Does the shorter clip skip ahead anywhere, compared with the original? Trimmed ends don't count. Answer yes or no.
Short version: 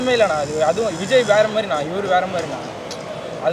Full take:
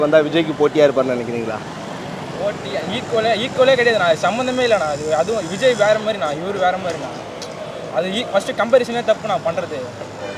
no